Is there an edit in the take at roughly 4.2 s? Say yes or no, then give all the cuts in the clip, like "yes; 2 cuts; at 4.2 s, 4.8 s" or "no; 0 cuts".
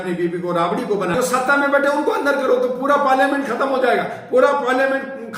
no; 1 cut; at 1.1 s